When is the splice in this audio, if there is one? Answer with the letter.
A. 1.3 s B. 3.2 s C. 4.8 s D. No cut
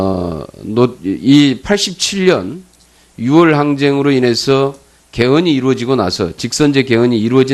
A